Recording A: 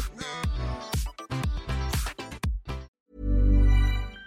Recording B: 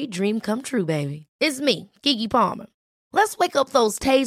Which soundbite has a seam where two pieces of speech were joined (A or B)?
A